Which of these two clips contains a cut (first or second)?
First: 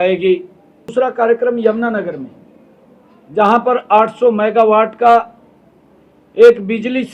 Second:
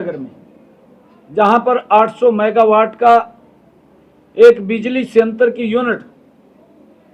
first